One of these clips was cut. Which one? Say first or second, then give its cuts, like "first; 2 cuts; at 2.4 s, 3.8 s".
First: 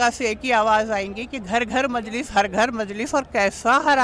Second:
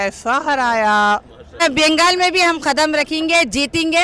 second; 1 cut; at 1.6 s